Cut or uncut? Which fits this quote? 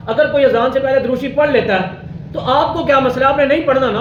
uncut